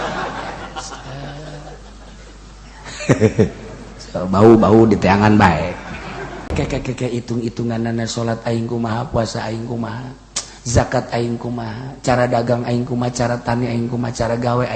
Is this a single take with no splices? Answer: no; 1 cut; at 6.5 s

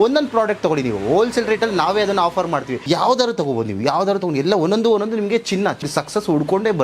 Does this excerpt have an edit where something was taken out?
yes; 2 cuts; at 2.8 s, 5.9 s

